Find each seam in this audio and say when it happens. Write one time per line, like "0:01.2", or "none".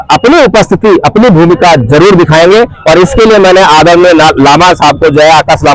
none